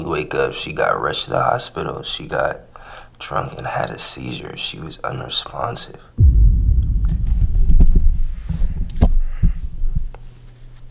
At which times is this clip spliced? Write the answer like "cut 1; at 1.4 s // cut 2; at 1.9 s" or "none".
none